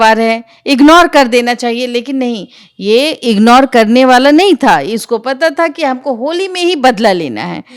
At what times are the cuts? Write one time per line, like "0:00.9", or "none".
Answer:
none

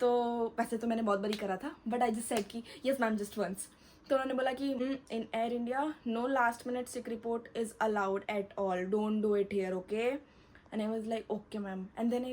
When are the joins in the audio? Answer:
0:04.8

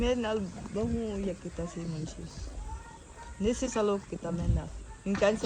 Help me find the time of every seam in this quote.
none

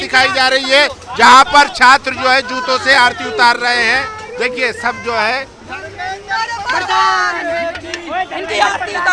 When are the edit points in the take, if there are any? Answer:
none

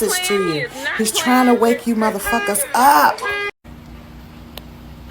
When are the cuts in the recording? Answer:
0:03.6

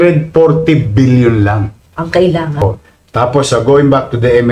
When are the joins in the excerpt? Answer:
0:02.6

